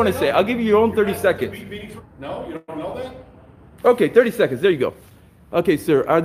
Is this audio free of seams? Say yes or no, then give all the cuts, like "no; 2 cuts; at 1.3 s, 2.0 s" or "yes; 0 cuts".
no; 1 cut; at 2.0 s